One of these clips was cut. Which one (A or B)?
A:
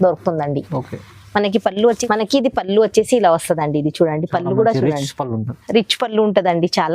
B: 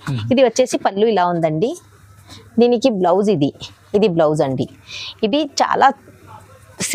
A